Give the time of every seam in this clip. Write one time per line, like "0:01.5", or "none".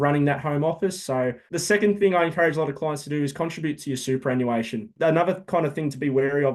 0:01.4
0:04.9